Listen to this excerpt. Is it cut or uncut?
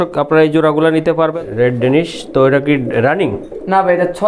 cut